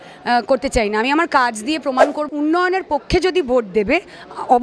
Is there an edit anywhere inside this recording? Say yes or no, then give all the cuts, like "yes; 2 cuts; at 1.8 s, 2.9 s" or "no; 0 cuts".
yes; 1 cut; at 2.2 s